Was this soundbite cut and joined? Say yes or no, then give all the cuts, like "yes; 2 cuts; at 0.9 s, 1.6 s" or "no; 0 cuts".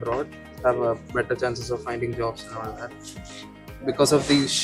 no; 0 cuts